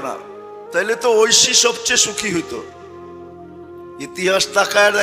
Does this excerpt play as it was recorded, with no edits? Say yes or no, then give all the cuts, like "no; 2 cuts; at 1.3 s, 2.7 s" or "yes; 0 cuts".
no; 2 cuts; at 2.6 s, 4.0 s